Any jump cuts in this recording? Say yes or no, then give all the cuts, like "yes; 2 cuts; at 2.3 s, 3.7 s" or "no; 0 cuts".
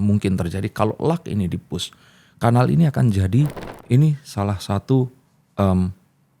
yes; 1 cut; at 3.7 s